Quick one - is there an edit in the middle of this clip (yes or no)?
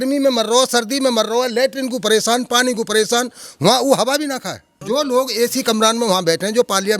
yes